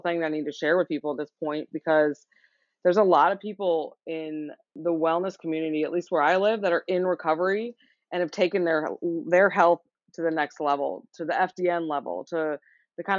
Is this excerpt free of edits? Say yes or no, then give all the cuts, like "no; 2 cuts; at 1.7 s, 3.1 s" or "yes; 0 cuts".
no; 1 cut; at 4.7 s